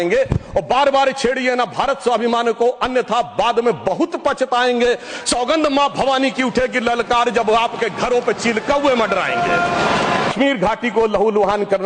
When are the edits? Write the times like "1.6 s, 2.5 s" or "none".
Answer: 10.3 s